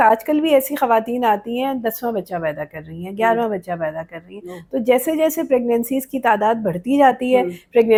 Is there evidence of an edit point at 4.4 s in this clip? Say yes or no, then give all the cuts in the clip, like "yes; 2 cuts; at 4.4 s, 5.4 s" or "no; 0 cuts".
no; 0 cuts